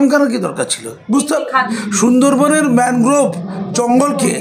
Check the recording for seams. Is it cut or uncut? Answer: cut